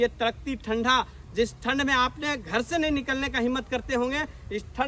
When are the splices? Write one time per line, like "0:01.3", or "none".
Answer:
none